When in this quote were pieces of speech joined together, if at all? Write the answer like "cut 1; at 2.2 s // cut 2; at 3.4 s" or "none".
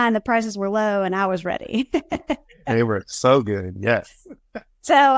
none